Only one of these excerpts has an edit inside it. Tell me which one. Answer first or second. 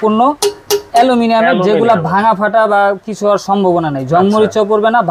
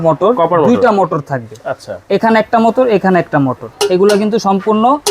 second